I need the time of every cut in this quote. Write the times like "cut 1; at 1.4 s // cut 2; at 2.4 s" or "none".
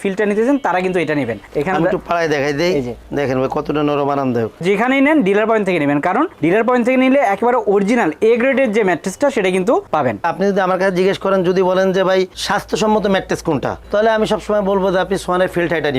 cut 1; at 4.6 s // cut 2; at 10.2 s